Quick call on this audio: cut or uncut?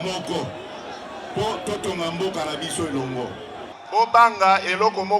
cut